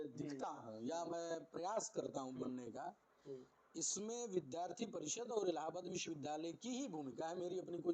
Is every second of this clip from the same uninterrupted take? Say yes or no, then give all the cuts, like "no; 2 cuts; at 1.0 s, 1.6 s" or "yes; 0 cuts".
yes; 0 cuts